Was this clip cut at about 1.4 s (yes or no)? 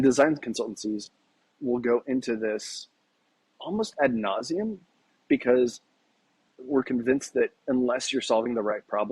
yes